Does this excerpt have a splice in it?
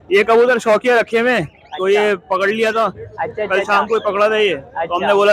no; 0 cuts

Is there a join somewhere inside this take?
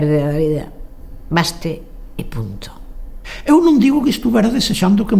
yes; 1 cut; at 3.2 s

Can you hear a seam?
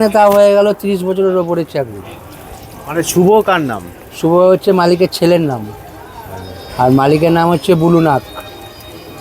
no; 0 cuts

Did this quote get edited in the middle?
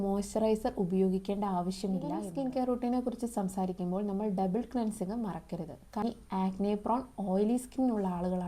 yes; 2 cuts; at 2.3 s, 6.0 s

